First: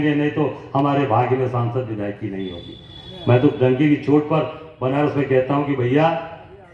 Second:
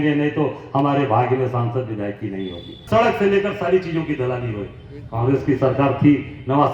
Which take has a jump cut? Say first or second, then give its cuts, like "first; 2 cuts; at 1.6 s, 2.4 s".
second; 1 cut; at 2.7 s